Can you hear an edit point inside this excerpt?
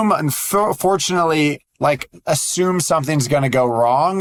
no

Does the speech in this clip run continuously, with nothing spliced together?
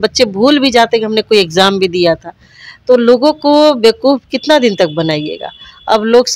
yes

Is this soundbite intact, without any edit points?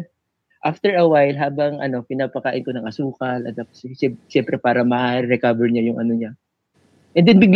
yes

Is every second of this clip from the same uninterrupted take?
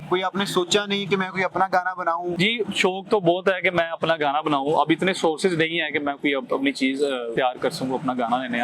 no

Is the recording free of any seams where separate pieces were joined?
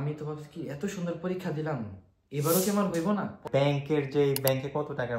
no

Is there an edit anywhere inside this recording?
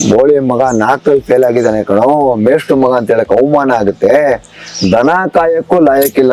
no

